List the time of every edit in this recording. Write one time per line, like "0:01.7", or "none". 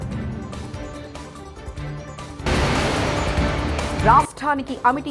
0:02.4
0:04.0